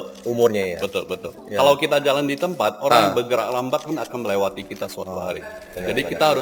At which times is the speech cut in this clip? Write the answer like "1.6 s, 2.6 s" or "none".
none